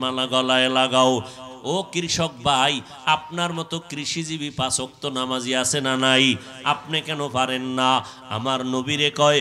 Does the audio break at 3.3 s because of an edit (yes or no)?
no